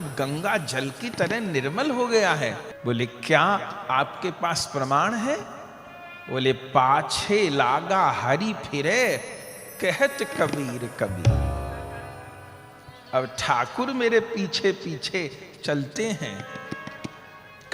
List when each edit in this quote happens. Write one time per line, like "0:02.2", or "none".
0:02.7